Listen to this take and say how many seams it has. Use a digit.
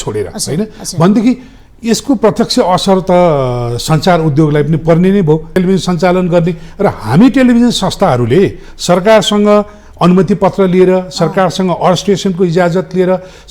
1